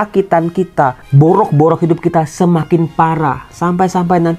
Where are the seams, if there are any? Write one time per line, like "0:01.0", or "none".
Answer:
0:01.0